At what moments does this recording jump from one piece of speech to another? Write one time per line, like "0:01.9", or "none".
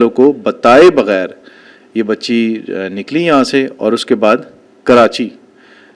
none